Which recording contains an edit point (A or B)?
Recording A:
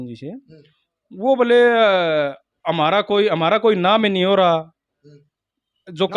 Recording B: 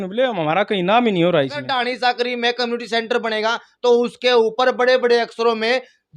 B